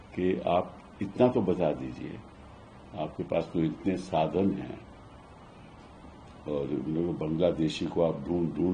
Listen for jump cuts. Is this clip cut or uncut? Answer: uncut